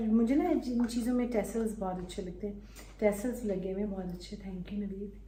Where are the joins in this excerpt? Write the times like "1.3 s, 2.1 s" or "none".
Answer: none